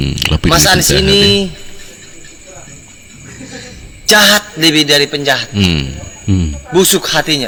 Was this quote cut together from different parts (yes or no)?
no